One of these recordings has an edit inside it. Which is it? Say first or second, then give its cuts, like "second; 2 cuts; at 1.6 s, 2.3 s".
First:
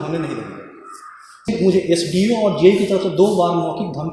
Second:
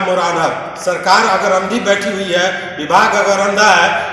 first; 1 cut; at 1.5 s